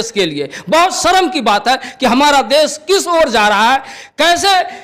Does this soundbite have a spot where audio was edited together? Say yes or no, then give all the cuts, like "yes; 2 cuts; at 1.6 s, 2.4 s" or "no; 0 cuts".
no; 0 cuts